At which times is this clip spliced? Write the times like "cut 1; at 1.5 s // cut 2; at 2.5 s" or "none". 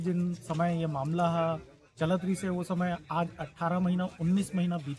none